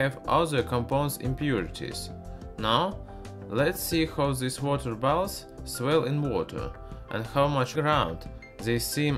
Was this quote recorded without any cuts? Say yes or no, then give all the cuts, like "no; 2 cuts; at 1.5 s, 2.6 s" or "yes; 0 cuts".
yes; 0 cuts